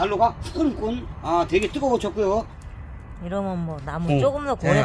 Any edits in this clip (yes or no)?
yes